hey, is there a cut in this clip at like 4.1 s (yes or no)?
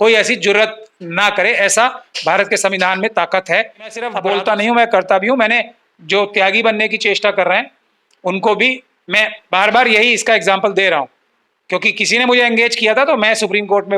yes